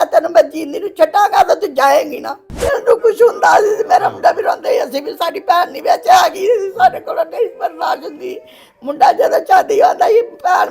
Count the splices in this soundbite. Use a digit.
1